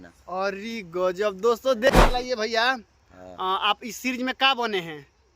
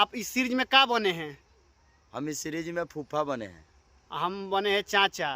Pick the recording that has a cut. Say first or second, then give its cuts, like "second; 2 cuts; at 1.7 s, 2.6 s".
first; 1 cut; at 1.9 s